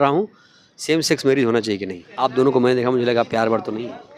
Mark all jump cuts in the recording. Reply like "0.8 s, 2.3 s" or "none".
2.0 s